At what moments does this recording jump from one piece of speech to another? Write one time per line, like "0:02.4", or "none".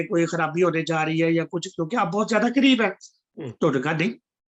none